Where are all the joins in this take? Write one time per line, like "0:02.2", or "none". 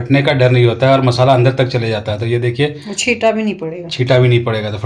none